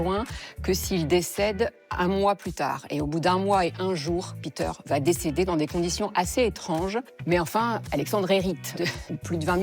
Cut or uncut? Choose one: uncut